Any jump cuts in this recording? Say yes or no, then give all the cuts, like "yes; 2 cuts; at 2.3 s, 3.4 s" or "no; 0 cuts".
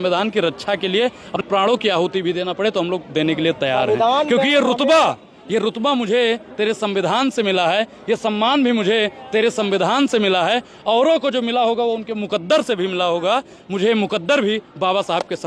yes; 1 cut; at 1.4 s